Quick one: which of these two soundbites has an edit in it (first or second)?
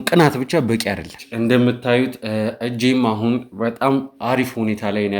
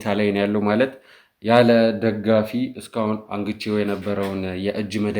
first